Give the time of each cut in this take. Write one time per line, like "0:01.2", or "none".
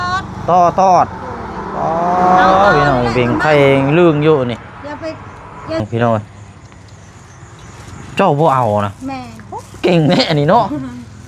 0:05.8